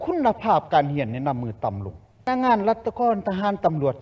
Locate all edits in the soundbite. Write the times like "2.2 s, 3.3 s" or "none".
2.2 s